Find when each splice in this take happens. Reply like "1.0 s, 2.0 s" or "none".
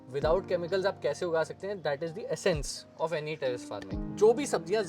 3.9 s